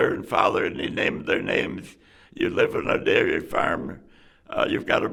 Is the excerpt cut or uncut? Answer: uncut